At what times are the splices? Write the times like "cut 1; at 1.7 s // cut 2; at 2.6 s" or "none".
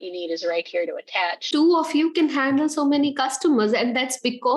cut 1; at 1.4 s